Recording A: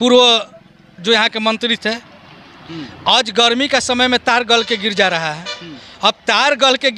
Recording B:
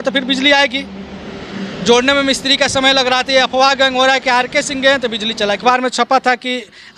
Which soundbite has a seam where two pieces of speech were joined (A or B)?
B